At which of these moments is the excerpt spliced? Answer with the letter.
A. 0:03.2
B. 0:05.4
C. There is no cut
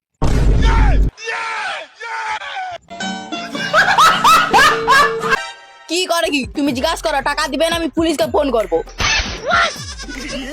B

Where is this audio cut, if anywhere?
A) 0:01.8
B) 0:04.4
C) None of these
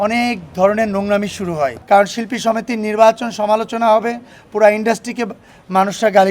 A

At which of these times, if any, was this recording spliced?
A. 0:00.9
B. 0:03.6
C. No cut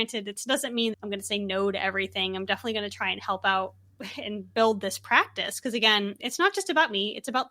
A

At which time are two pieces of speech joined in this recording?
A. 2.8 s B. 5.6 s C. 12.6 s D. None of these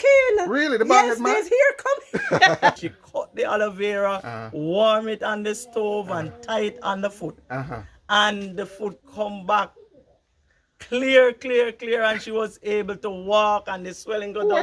A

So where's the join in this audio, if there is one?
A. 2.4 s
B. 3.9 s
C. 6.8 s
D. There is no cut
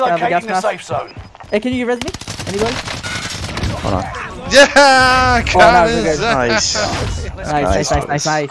D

